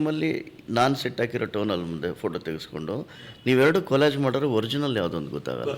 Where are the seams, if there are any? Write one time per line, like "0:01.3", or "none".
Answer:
none